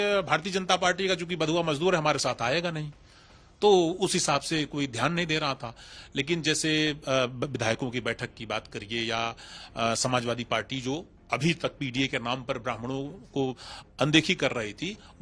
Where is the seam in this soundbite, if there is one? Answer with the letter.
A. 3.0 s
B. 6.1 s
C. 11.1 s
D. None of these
D